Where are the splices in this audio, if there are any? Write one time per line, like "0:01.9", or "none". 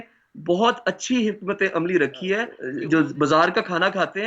0:02.6